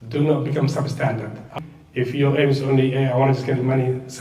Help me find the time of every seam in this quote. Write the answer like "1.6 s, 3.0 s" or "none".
1.5 s